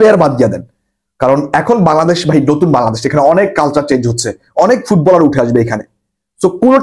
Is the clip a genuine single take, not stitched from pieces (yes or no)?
yes